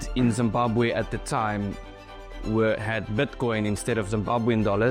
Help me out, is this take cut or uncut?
uncut